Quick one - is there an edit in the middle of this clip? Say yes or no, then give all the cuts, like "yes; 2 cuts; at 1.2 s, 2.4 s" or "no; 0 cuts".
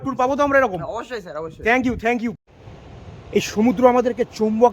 yes; 1 cut; at 2.4 s